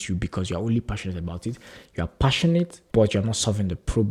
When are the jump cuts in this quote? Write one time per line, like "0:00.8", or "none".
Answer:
0:02.8